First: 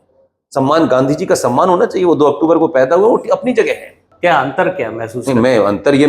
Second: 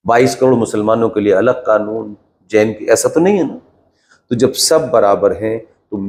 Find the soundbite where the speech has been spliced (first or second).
first